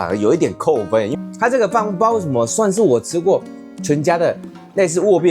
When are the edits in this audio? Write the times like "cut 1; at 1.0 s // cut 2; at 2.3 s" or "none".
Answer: cut 1; at 1.1 s

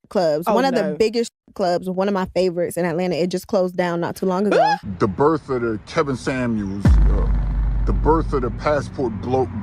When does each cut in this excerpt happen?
cut 1; at 4.9 s

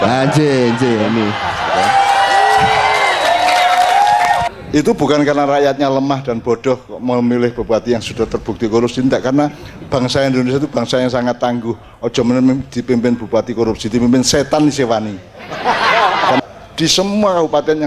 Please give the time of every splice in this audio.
cut 1; at 4.5 s // cut 2; at 16.4 s

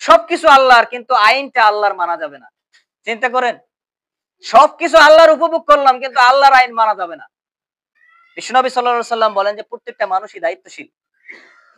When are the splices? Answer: cut 1; at 7.9 s

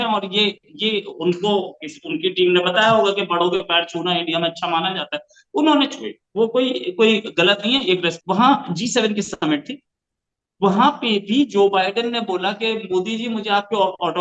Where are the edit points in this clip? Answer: cut 1; at 8.1 s

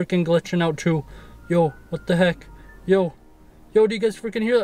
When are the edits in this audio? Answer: none

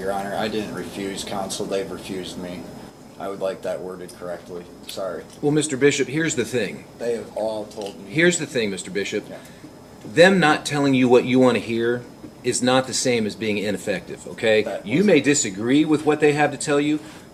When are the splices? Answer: none

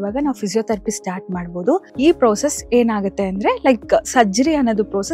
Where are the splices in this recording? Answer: cut 1; at 1.9 s

